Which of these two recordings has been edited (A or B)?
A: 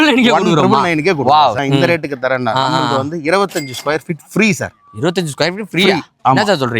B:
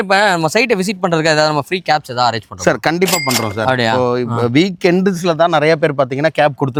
A